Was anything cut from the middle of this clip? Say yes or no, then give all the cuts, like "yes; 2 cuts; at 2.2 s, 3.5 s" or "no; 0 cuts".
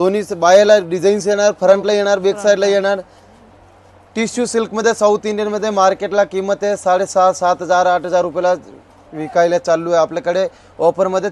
no; 0 cuts